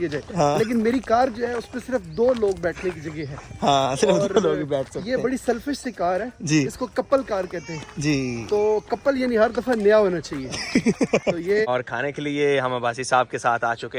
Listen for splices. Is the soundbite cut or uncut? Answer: cut